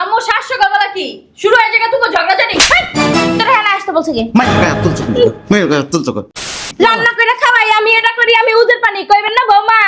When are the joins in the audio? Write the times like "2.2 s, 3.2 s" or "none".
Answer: 6.4 s